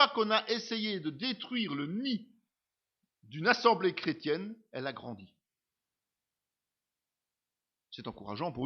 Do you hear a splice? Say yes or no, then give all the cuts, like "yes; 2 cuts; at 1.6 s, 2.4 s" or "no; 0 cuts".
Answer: yes; 1 cut; at 4.6 s